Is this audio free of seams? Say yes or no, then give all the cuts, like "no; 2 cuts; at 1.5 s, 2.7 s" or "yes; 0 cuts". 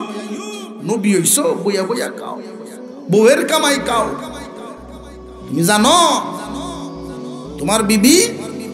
yes; 0 cuts